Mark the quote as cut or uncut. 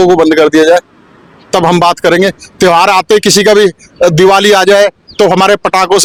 uncut